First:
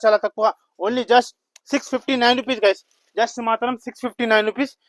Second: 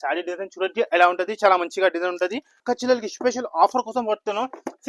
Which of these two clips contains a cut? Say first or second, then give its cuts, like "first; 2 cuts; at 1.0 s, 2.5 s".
second; 1 cut; at 2.6 s